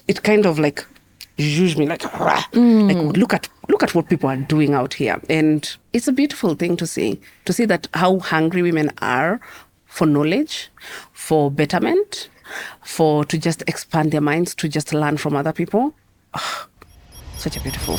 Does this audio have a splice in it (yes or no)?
no